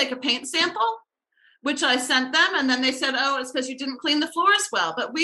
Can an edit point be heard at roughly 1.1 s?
no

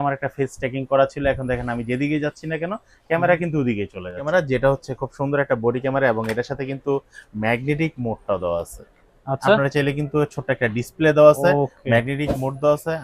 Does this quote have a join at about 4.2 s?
yes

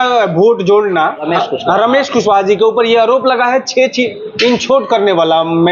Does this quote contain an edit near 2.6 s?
no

